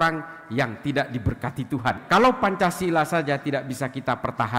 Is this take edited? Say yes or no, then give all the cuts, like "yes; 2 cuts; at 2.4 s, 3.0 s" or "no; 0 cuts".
yes; 1 cut; at 2.0 s